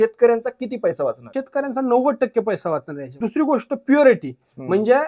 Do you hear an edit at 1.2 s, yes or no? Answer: yes